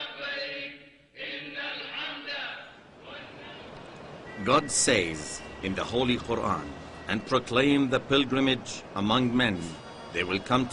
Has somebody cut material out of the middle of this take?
yes; 1 cut; at 7.8 s

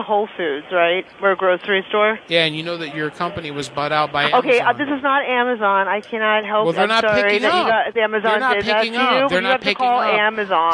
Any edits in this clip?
yes; 1 cut; at 2.9 s

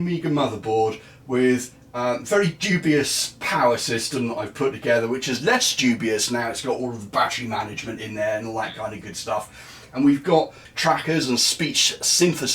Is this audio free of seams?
no; 1 cut; at 10.6 s

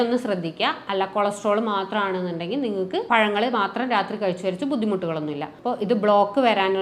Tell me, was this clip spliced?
yes; 1 cut; at 5.5 s

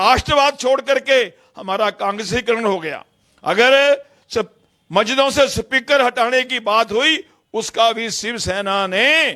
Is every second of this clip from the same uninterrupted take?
yes; 0 cuts

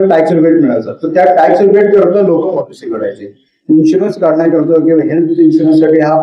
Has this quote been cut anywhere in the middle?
no; 0 cuts

